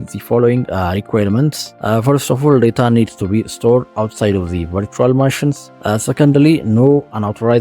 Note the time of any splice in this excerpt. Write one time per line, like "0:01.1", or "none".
0:01.7
0:05.7